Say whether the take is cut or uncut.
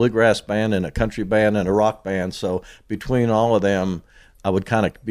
uncut